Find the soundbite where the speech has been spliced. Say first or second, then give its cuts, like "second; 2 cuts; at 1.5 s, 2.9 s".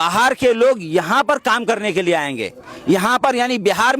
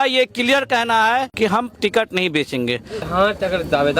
second; 2 cuts; at 1.3 s, 3.0 s